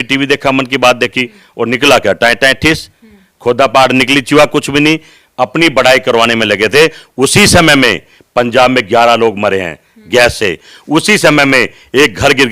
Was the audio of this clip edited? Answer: no; 0 cuts

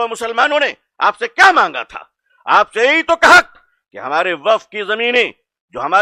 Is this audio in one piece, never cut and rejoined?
yes; 0 cuts

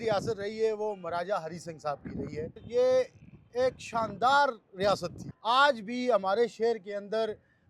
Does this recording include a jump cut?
yes; 2 cuts; at 2.6 s, 5.3 s

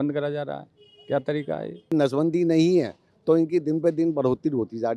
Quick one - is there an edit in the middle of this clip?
yes; 1 cut; at 1.9 s

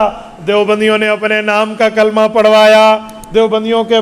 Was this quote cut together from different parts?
no; 0 cuts

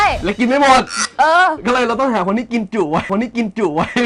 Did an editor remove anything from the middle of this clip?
no; 0 cuts

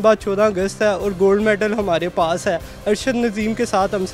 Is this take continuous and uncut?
yes; 0 cuts

